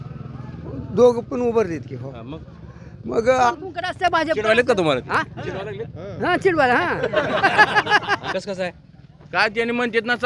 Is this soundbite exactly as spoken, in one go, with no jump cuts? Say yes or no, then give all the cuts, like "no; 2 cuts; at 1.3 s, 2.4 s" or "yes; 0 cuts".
no; 2 cuts; at 3.5 s, 8.3 s